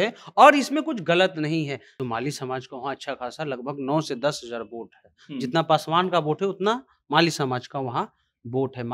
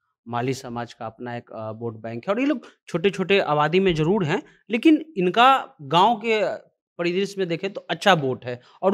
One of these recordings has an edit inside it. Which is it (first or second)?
first